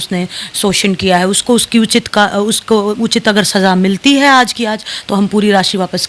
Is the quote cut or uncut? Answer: uncut